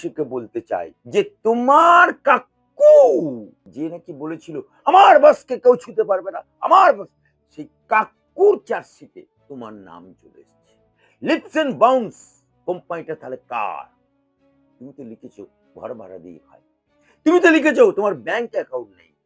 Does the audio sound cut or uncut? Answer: cut